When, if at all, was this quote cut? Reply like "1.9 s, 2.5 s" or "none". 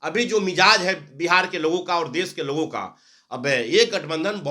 none